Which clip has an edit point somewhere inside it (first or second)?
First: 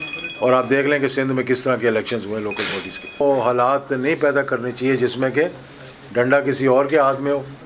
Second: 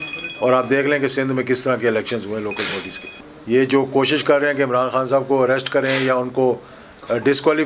first